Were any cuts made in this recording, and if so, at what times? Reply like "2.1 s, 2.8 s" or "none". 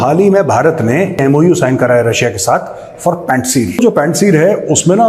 1.2 s, 3.8 s